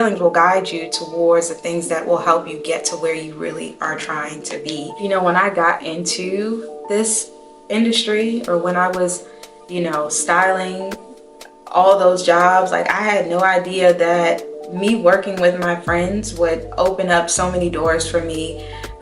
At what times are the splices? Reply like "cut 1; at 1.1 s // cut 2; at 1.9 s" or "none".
cut 1; at 4.9 s